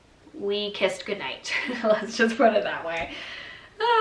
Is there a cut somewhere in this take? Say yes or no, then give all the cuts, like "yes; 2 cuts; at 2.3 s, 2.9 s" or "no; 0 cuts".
no; 0 cuts